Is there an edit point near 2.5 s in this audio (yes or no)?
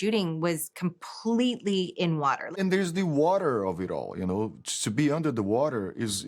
yes